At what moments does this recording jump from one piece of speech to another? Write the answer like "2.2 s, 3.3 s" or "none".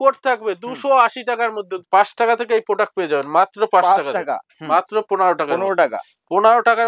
1.8 s, 4.5 s

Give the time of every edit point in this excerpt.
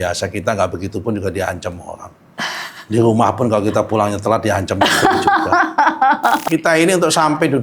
6.4 s

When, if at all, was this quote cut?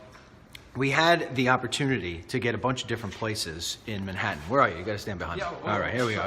5.0 s

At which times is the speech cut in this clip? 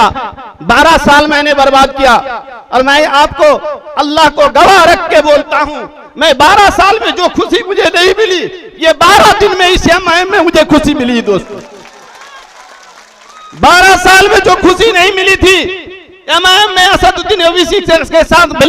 none

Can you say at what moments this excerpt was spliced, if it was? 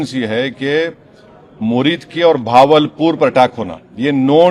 none

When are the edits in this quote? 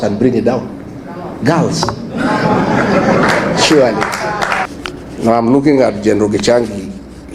4.7 s

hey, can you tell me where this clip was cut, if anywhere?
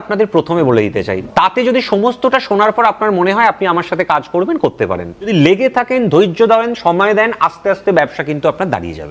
1.2 s, 5.3 s

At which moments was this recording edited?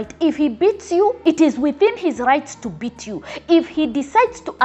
1.2 s

